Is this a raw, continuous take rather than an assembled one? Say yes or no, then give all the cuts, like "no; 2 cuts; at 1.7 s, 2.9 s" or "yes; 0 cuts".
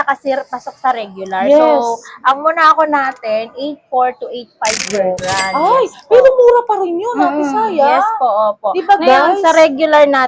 yes; 0 cuts